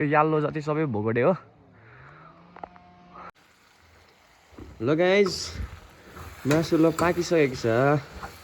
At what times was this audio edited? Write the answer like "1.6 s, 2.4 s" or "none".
3.4 s